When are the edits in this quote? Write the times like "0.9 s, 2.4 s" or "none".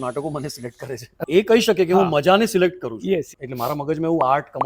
1.2 s, 3.4 s

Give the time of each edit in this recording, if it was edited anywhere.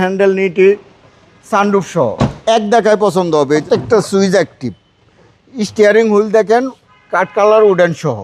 2.4 s, 3.6 s

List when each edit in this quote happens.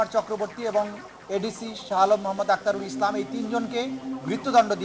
none

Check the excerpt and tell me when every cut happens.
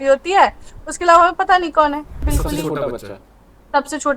2.3 s

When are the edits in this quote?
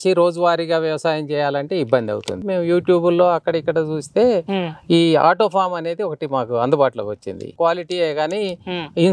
2.5 s, 7.5 s

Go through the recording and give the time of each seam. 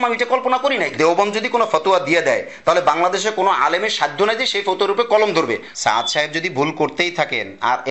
0.9 s, 5.7 s

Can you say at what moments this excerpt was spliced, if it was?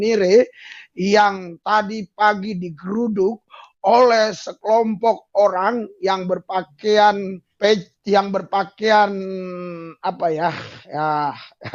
7.4 s

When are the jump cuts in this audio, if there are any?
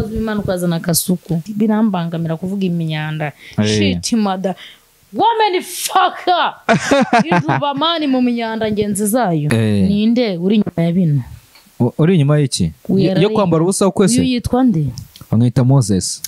1.4 s, 9.5 s

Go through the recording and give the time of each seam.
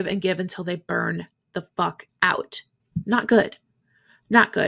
none

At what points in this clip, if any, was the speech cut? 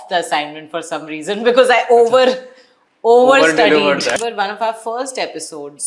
4.2 s

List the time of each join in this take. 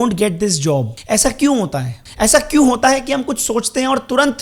0.9 s, 2.0 s

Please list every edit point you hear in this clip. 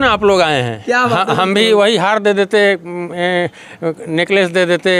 none

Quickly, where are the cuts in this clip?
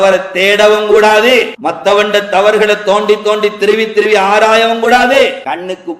1.5 s, 5.1 s

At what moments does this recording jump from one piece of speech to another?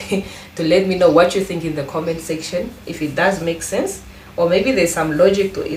none

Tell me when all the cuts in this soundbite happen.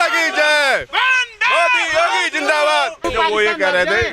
3.0 s

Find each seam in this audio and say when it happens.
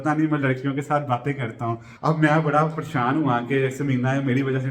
1.9 s

